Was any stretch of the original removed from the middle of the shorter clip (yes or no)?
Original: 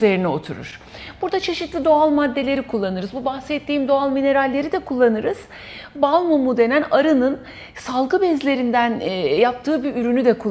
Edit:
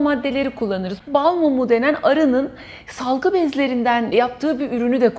yes